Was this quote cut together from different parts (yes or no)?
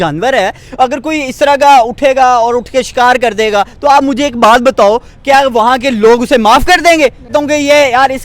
yes